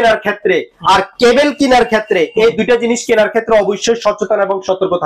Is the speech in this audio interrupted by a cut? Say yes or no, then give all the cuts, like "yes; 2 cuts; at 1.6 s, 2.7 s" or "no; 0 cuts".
no; 0 cuts